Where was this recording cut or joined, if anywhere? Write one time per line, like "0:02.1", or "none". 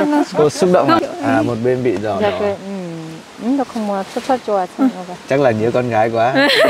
0:01.0